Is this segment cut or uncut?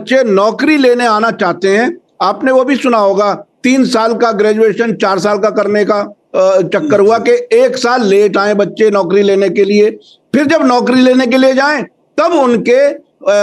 uncut